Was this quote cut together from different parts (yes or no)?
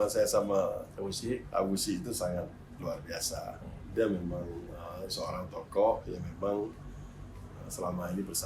no